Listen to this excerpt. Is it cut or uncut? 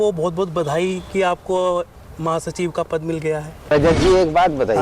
cut